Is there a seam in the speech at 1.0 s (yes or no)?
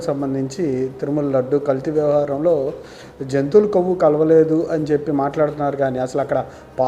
no